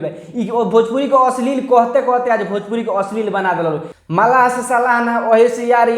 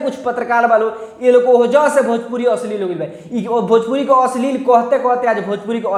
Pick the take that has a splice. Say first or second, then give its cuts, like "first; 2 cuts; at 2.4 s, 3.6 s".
first; 1 cut; at 4.0 s